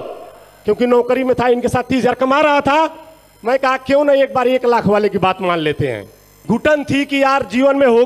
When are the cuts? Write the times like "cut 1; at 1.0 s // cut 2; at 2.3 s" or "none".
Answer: cut 1; at 6.4 s